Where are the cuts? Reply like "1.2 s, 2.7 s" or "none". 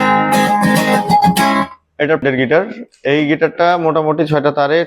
2.2 s